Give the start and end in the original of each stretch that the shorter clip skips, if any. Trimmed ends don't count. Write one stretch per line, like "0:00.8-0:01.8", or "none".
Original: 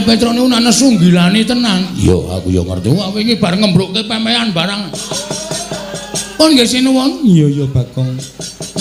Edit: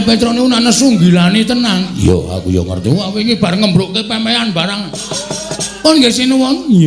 0:05.6-0:06.1